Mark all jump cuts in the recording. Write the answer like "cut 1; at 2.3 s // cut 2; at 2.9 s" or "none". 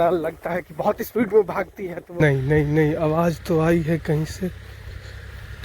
cut 1; at 2.2 s